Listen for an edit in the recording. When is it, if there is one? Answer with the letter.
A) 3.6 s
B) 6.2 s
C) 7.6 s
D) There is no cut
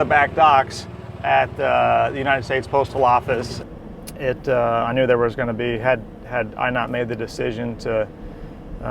A